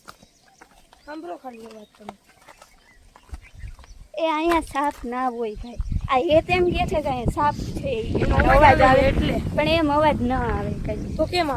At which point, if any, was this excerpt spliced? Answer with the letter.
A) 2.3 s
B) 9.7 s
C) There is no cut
C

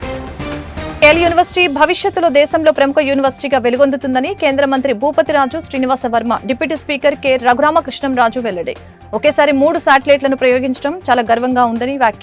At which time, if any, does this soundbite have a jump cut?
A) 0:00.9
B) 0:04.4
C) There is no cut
A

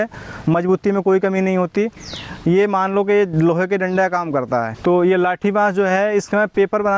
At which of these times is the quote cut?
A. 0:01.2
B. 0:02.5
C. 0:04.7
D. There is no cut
C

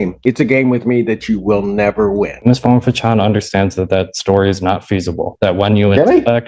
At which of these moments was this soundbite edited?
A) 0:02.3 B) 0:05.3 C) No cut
A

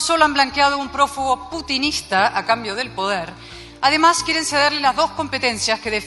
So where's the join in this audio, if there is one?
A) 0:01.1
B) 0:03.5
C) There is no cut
C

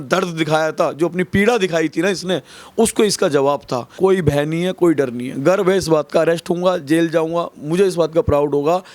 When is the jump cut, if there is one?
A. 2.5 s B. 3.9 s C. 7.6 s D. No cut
B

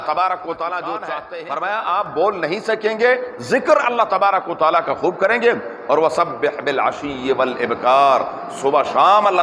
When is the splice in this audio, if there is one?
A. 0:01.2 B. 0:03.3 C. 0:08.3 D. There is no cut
A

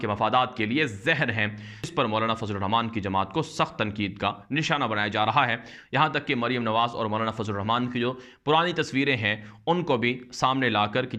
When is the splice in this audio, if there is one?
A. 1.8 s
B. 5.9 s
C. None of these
A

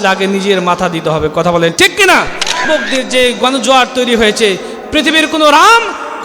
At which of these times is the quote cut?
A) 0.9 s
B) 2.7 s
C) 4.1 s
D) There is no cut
B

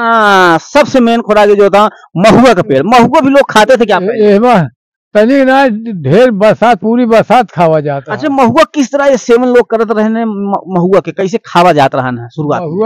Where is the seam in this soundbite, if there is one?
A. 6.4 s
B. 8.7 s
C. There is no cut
C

